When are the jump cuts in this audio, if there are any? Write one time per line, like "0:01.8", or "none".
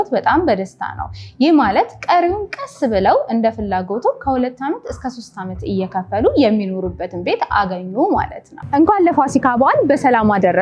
0:08.4